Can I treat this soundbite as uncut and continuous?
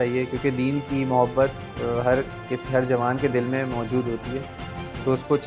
yes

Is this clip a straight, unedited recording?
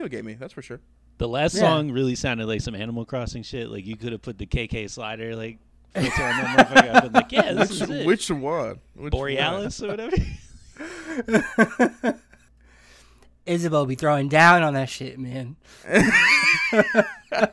no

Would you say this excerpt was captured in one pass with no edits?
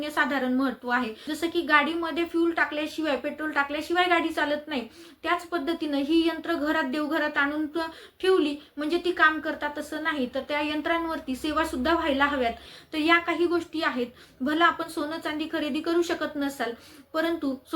no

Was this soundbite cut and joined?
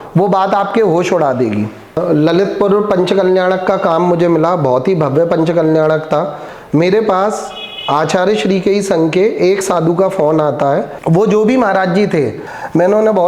yes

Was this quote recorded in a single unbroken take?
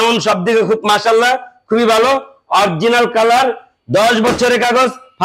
yes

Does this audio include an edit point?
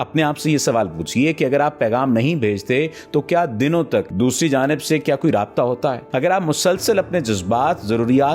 yes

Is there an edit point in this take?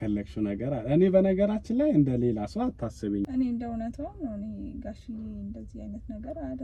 yes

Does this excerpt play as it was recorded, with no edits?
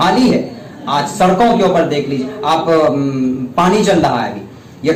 yes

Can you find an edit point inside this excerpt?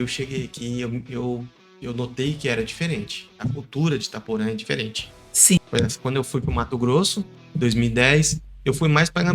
yes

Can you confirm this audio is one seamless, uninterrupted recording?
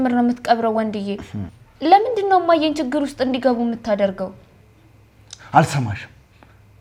yes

